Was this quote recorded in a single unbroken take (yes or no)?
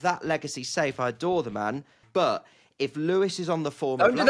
no